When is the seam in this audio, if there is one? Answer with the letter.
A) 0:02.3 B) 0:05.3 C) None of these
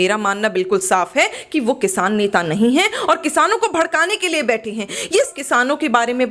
B